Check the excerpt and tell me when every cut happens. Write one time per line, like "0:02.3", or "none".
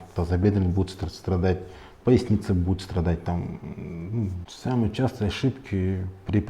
0:04.4